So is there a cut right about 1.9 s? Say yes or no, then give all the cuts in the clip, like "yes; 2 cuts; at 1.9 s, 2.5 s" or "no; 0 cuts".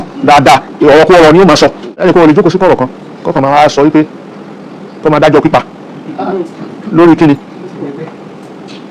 yes; 1 cut; at 1.9 s